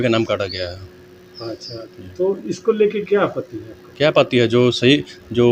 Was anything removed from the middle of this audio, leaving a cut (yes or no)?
no